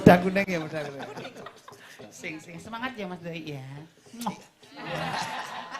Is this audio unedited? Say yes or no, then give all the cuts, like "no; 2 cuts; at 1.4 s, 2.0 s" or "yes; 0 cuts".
no; 1 cut; at 1.0 s